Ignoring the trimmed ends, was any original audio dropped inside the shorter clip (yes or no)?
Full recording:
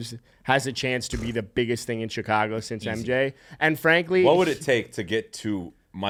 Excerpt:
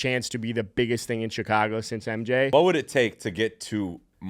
yes